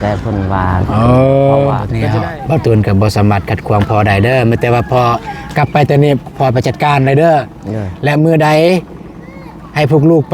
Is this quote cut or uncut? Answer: cut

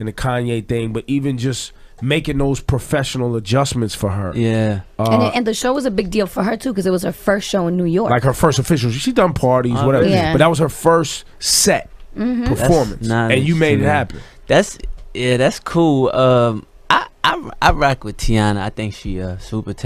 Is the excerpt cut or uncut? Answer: uncut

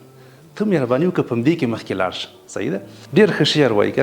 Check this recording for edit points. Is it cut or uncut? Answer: cut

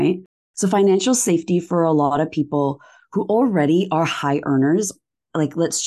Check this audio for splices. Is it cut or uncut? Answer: uncut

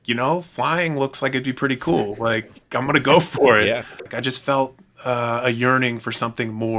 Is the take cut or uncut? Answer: cut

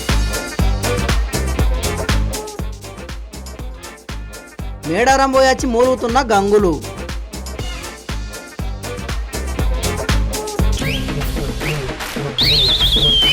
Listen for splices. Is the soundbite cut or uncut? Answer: cut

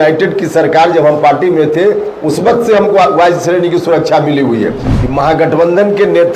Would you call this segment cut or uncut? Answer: cut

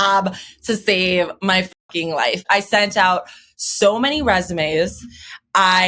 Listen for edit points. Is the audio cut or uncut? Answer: cut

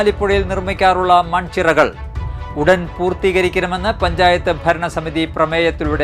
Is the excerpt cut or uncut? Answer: uncut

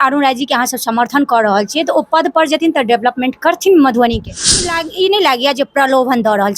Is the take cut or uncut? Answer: cut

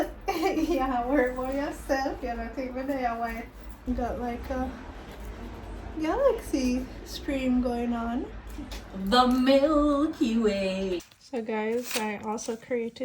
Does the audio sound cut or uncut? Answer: cut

